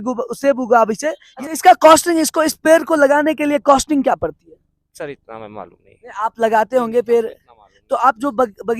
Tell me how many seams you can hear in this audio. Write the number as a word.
one